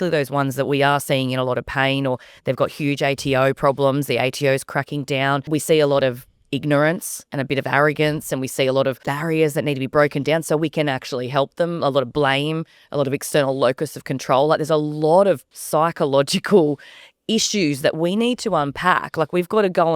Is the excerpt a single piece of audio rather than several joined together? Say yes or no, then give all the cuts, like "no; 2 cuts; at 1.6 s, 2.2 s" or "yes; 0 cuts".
no; 3 cuts; at 5.5 s, 9.1 s, 15.5 s